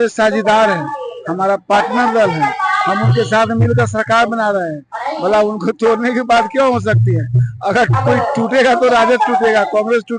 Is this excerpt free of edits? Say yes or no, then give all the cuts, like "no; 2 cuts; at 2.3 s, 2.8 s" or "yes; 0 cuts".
yes; 0 cuts